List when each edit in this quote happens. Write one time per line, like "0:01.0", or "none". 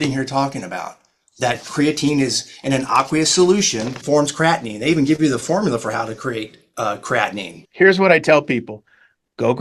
0:03.9
0:07.6